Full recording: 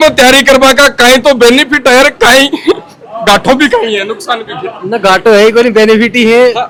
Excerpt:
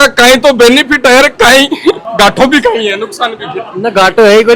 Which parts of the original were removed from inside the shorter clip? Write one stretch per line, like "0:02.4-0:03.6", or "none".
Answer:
0:02.9-0:03.1